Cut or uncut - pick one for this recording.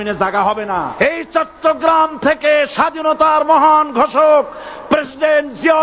cut